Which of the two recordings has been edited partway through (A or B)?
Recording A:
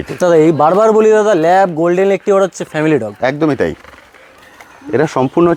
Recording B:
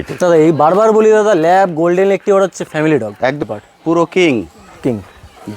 B